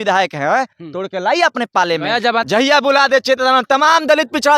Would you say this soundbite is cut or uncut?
cut